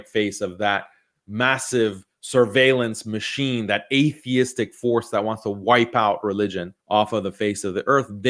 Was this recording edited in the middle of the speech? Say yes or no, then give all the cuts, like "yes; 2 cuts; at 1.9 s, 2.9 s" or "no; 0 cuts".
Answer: no; 0 cuts